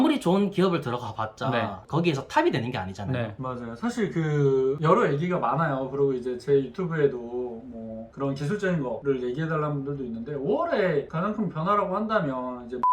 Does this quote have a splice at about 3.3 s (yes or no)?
yes